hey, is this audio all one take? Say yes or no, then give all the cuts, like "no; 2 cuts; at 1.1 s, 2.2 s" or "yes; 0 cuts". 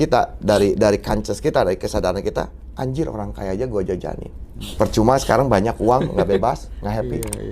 no; 1 cut; at 4.6 s